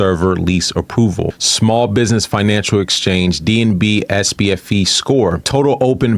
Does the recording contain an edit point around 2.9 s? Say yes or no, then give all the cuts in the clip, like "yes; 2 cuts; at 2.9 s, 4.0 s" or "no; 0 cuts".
no; 1 cut; at 1.3 s